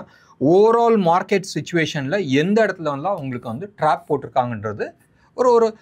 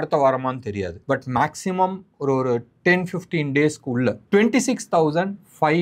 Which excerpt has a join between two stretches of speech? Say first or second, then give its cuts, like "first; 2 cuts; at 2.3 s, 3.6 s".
second; 2 cuts; at 0.9 s, 4.2 s